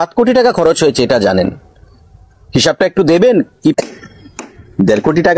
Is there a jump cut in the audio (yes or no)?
yes